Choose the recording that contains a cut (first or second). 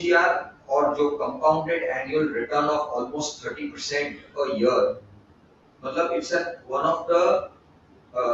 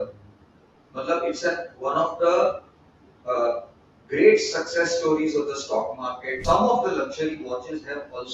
second